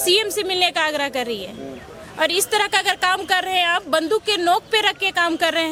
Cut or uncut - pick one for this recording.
uncut